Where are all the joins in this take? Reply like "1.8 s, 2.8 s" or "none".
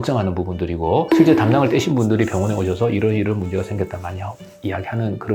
none